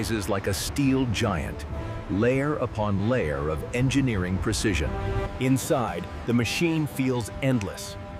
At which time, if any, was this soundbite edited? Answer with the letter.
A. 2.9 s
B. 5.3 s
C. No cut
C